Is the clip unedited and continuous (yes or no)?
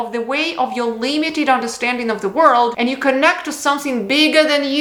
yes